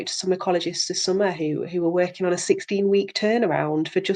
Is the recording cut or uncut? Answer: uncut